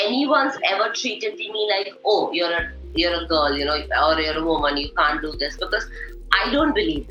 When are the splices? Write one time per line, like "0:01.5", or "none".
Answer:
none